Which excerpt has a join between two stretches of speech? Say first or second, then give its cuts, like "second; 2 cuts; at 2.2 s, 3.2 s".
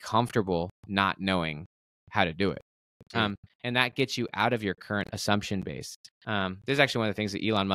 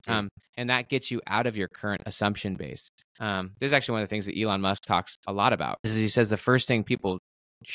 second; 1 cut; at 5.9 s